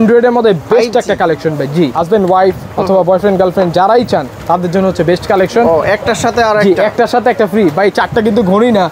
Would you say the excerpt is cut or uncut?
cut